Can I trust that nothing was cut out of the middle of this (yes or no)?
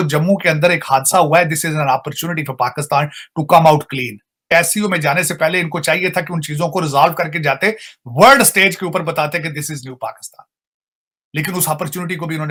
yes